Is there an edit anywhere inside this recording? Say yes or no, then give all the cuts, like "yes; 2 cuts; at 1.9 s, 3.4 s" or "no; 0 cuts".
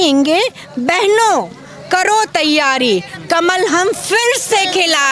no; 0 cuts